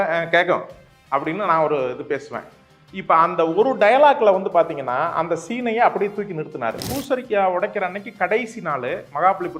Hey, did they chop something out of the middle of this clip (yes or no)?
yes